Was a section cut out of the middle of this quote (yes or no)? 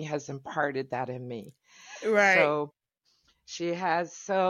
no